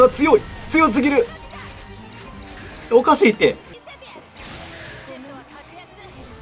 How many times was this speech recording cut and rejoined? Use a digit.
1